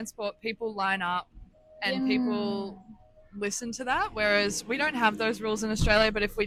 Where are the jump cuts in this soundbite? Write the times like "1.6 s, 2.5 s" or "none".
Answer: none